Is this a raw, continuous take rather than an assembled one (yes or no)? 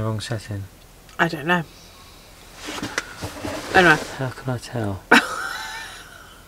yes